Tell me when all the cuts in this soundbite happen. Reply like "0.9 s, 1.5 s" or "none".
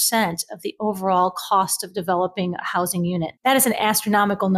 none